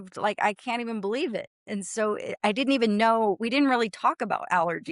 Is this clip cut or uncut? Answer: uncut